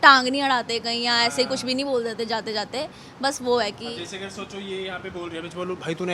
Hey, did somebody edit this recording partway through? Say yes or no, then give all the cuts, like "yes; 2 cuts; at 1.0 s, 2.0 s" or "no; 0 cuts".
no; 0 cuts